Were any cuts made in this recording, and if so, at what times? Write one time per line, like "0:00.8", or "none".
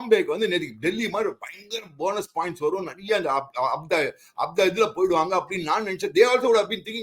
none